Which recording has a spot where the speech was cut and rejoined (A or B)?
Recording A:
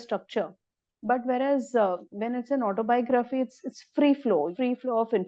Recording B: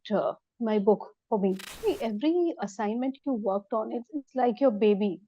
B